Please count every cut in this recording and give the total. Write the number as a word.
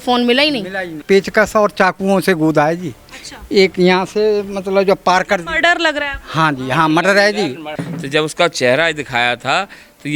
two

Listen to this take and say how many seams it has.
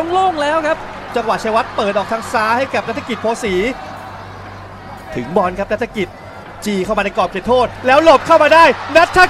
one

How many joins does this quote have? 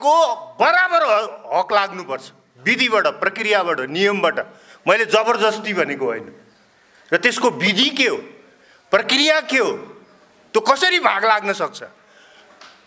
zero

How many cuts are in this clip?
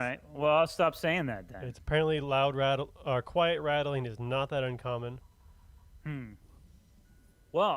one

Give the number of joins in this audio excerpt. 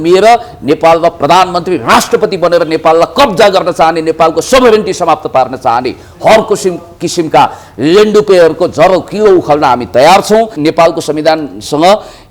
one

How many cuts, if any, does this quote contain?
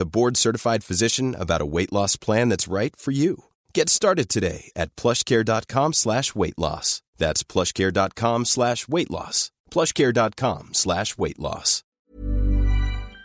one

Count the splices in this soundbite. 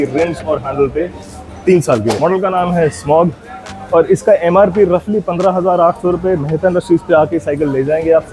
one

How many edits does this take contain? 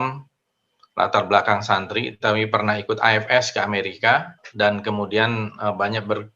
one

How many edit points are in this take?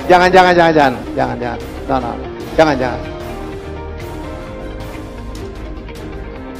zero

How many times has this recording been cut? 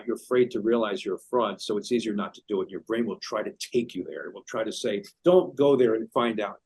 one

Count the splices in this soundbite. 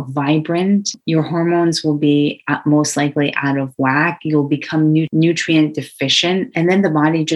three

